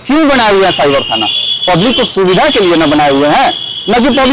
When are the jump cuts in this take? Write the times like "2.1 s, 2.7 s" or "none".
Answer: none